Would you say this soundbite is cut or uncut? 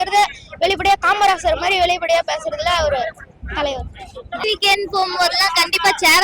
cut